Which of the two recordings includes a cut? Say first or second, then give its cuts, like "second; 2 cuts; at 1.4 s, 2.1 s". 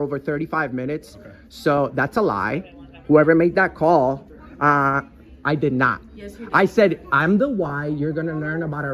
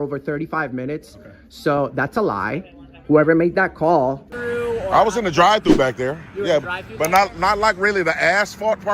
second; 1 cut; at 4.3 s